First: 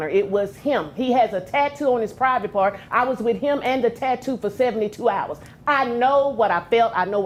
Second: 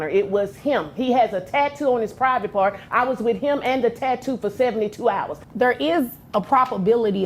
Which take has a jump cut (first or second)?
second